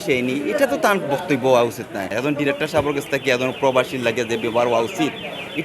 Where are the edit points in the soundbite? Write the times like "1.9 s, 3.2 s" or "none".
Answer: 2.1 s